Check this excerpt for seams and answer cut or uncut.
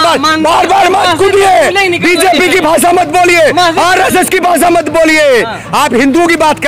uncut